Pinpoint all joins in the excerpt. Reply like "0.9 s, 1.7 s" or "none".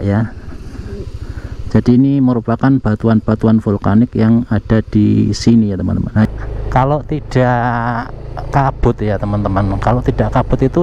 6.2 s